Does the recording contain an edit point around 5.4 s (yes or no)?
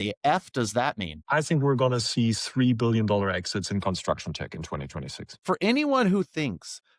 yes